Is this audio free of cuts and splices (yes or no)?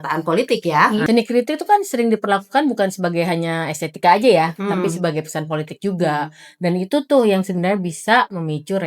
no